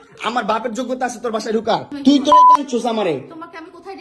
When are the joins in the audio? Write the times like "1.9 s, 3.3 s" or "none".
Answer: 1.9 s